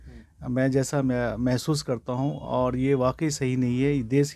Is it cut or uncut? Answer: uncut